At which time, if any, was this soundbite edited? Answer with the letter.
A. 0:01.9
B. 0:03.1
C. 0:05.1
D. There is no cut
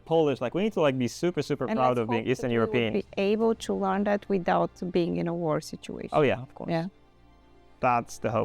D